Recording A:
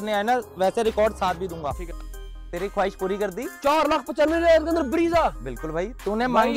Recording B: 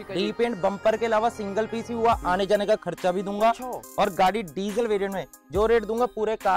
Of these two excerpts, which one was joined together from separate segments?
A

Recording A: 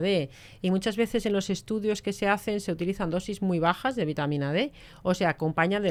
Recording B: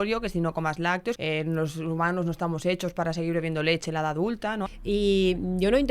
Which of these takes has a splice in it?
B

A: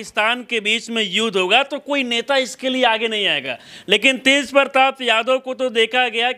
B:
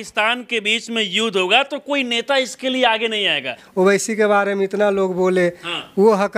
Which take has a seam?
B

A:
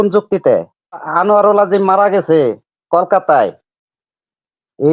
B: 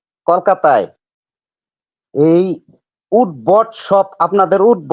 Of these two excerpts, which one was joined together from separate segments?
A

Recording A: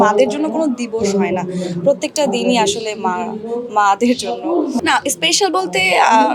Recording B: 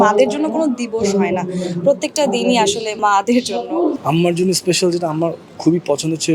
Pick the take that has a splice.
B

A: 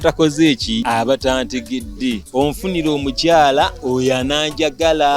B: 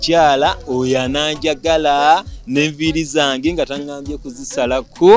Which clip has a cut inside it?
A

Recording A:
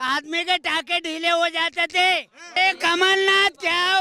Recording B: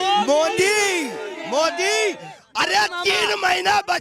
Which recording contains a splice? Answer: A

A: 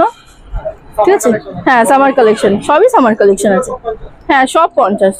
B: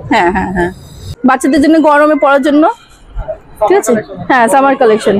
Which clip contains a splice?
B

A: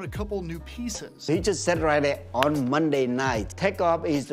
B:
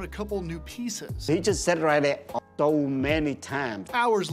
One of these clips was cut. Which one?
B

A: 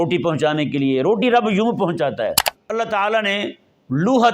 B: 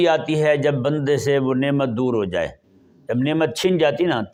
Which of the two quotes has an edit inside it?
A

